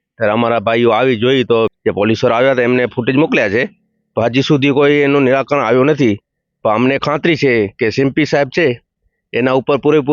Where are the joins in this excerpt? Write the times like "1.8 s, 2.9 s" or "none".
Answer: 1.7 s